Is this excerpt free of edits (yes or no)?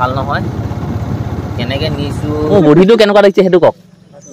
no